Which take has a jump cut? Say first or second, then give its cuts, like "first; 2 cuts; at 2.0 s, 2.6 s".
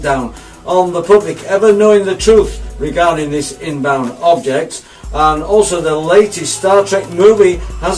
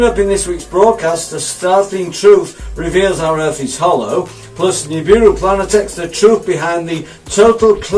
first; 1 cut; at 3.6 s